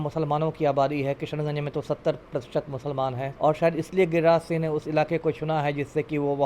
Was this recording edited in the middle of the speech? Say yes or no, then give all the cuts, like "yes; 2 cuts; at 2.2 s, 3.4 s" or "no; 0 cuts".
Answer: yes; 1 cut; at 3.3 s